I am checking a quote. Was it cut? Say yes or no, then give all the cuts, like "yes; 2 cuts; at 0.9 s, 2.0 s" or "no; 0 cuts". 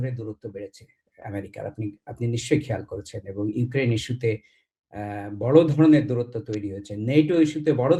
no; 0 cuts